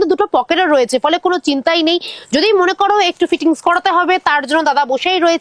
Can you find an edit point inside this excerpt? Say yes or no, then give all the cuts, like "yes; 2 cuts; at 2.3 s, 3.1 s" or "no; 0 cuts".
no; 0 cuts